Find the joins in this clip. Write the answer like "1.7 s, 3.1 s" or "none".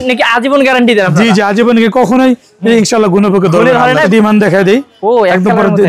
3.9 s